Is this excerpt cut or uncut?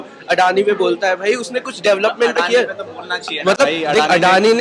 uncut